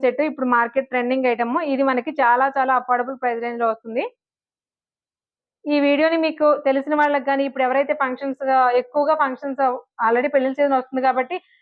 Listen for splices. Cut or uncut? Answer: uncut